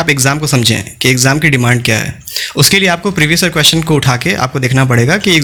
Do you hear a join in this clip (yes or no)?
no